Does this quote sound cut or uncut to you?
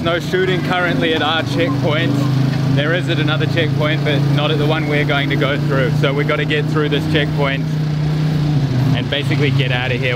uncut